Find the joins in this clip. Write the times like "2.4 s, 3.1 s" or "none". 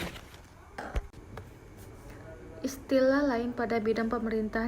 1.1 s

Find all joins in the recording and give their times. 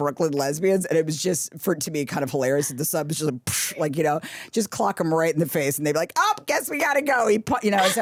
none

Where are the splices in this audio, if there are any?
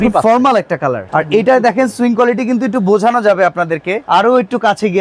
1.0 s, 3.9 s

